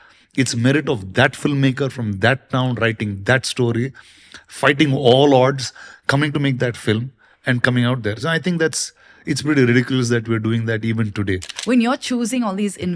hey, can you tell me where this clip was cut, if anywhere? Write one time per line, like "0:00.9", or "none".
0:11.5